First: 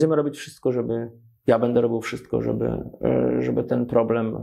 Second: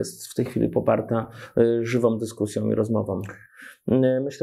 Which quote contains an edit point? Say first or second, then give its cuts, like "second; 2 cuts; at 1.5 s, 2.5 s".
second; 1 cut; at 3.4 s